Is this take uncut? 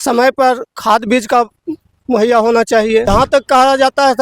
no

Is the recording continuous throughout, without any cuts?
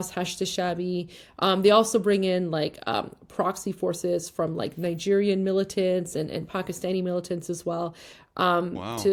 yes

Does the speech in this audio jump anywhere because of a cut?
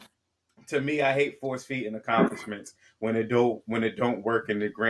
no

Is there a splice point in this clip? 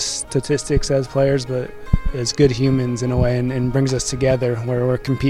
yes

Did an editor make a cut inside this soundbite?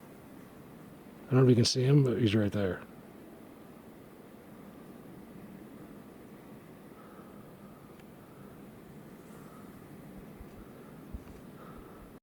no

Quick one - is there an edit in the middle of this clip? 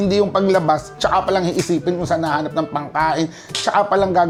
no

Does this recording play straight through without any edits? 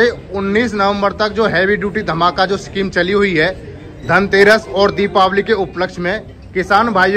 yes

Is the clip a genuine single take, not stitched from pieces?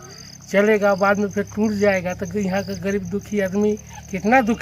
yes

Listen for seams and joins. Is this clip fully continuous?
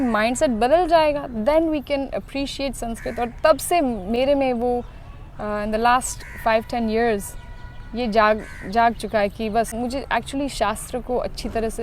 no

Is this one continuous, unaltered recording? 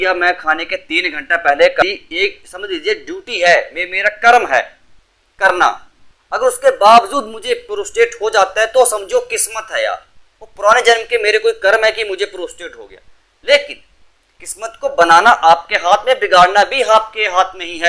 no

